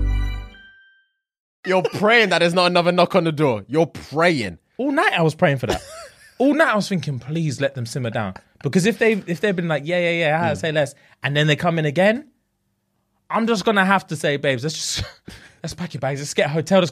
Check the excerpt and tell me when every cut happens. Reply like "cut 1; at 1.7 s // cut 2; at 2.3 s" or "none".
cut 1; at 1.5 s